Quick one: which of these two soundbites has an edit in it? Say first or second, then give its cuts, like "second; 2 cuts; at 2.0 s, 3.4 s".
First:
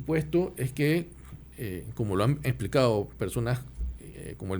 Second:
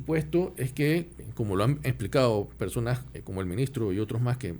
second; 2 cuts; at 1.2 s, 3.2 s